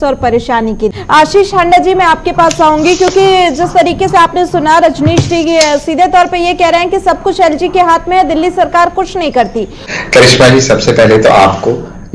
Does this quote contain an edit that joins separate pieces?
yes; 2 cuts; at 0.9 s, 9.8 s

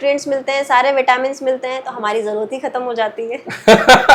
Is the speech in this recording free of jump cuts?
yes; 0 cuts

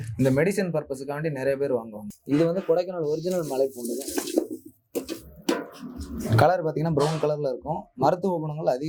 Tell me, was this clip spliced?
no; 0 cuts

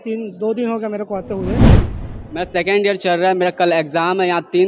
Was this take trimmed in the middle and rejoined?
yes; 1 cut; at 1.9 s

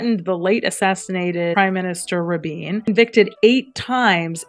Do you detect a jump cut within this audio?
yes; 2 cuts; at 1.5 s, 2.9 s

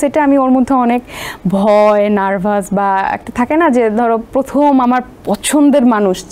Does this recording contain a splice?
no; 0 cuts

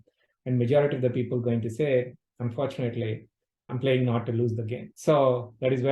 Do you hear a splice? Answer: yes; 2 cuts; at 3.7 s, 4.8 s

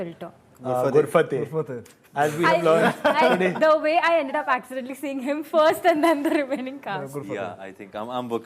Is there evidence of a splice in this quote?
no; 0 cuts

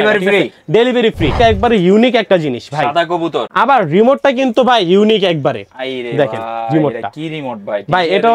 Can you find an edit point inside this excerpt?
yes; 2 cuts; at 1.4 s, 3.5 s

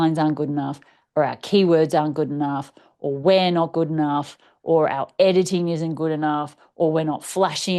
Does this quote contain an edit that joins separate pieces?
no; 0 cuts

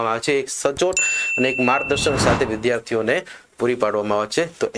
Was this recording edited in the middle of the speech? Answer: no; 0 cuts

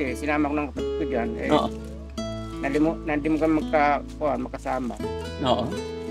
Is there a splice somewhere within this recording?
no; 0 cuts

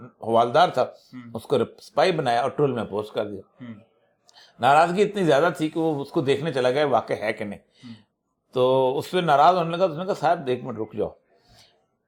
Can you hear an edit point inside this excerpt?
no; 0 cuts

